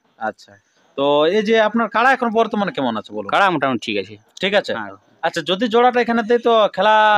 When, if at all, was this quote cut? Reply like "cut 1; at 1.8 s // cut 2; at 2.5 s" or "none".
none